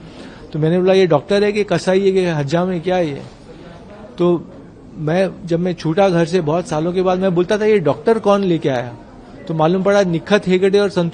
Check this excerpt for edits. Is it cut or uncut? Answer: uncut